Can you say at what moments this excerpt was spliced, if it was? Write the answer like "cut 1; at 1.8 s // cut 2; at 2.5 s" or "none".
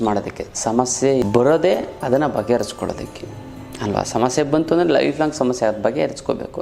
cut 1; at 1.2 s